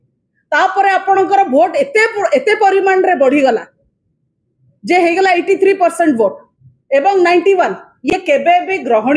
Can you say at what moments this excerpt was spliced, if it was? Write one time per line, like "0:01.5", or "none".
none